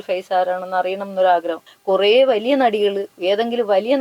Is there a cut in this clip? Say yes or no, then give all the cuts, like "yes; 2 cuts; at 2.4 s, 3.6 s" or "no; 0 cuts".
yes; 1 cut; at 1.6 s